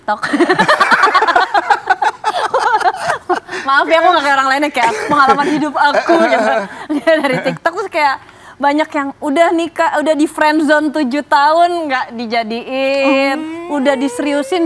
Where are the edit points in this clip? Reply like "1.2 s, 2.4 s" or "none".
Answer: none